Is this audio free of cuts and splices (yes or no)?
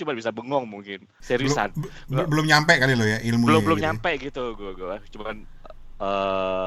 yes